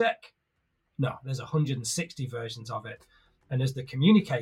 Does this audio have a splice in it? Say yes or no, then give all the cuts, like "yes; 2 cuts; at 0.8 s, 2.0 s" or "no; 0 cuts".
no; 0 cuts